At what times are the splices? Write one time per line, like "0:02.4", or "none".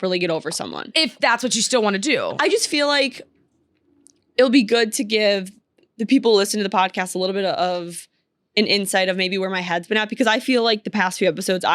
0:02.3